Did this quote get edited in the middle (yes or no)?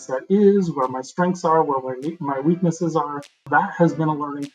yes